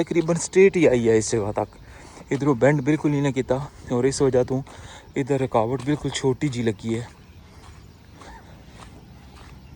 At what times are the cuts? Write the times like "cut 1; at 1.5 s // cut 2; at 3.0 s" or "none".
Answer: none